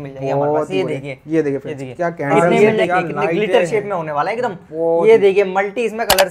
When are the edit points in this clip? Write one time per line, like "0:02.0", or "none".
0:02.6